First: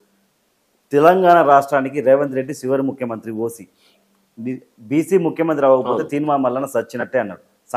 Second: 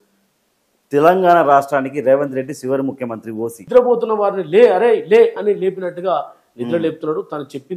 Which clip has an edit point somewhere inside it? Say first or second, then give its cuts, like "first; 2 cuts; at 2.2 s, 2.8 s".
second; 1 cut; at 3.6 s